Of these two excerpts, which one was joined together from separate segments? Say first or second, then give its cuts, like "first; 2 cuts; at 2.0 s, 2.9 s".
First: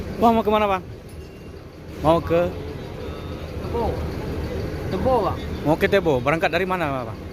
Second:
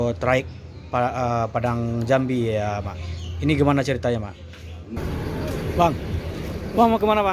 second; 1 cut; at 5.0 s